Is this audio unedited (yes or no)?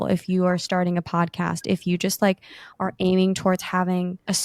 yes